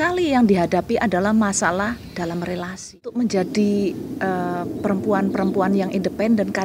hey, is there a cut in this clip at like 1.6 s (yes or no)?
no